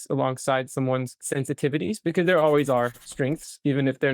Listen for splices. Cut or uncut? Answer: cut